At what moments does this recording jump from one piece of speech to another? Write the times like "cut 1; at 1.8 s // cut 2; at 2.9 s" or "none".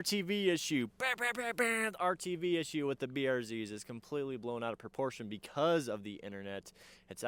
none